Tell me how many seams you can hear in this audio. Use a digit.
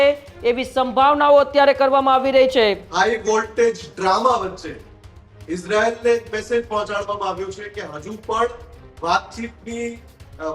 1